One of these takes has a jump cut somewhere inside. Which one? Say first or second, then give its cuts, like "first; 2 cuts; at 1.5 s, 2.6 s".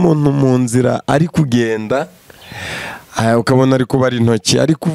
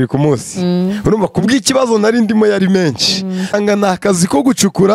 second; 1 cut; at 3.5 s